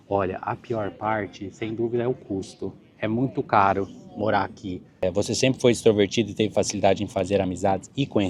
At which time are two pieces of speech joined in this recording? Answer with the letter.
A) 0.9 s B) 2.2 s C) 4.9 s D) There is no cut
C